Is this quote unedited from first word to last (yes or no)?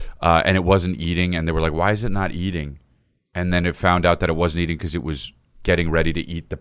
yes